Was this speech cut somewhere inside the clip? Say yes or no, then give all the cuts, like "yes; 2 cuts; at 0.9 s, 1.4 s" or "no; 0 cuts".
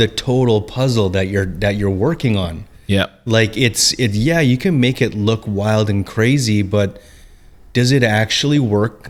no; 0 cuts